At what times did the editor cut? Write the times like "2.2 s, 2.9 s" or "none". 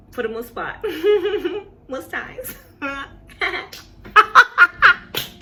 none